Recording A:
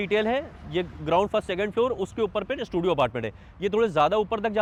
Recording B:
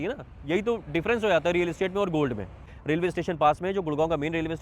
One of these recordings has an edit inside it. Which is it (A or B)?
B